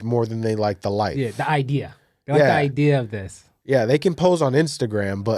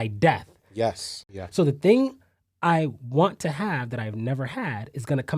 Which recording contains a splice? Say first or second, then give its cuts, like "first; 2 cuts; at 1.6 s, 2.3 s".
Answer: second; 1 cut; at 1.1 s